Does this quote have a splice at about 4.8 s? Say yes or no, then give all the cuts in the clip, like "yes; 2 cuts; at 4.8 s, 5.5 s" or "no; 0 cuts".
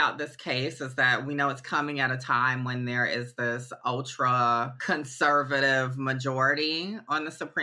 yes; 1 cut; at 4.8 s